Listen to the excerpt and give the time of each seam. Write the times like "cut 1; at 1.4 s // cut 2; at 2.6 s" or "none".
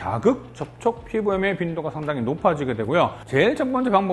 cut 1; at 3.2 s

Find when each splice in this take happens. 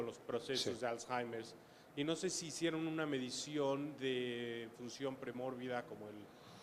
cut 1; at 3.9 s

